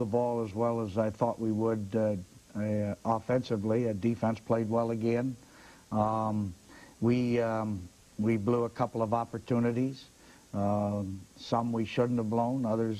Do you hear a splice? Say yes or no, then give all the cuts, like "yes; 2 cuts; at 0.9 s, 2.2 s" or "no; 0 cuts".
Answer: no; 0 cuts